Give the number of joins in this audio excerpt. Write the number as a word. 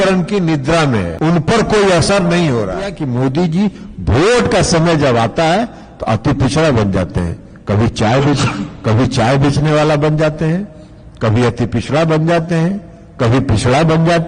two